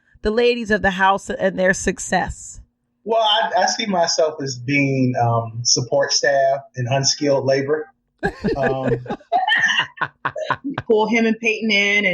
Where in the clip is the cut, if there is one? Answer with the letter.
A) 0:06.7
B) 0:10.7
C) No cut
B